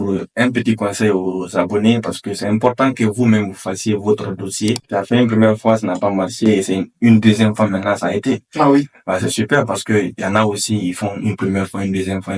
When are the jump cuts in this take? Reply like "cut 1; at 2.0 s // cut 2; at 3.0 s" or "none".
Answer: cut 1; at 4.8 s